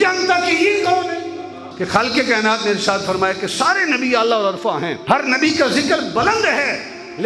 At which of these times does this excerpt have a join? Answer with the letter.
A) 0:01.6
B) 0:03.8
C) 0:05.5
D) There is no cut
A